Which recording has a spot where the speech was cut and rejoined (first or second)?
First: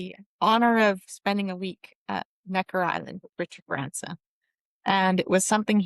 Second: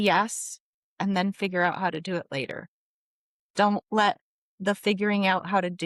first